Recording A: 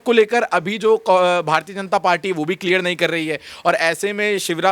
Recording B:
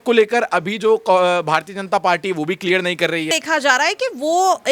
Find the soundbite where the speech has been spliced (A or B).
B